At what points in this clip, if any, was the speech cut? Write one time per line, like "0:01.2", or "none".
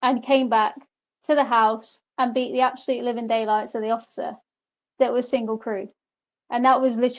none